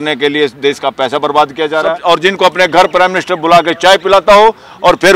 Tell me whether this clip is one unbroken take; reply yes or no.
no